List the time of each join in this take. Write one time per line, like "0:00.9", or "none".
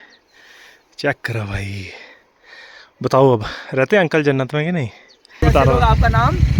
0:05.4

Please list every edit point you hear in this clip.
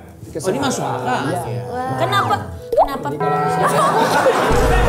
0:01.4

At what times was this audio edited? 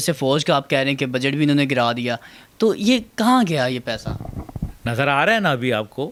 none

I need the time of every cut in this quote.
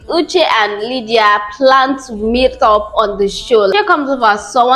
0:03.7

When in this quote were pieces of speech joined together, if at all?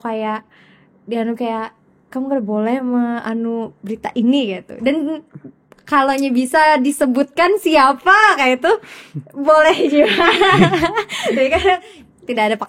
none

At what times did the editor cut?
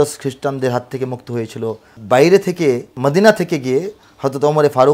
0:01.9
0:03.0

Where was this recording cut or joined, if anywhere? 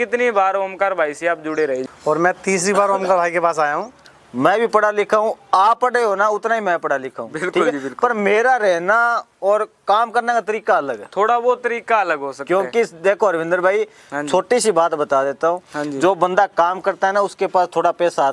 0:01.9
0:04.0

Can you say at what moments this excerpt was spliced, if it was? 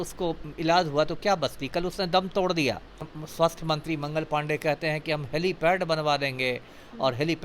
0:03.2

